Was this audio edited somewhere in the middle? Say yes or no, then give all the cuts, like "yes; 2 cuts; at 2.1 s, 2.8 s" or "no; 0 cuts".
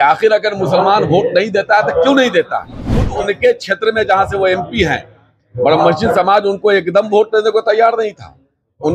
yes; 1 cut; at 3.1 s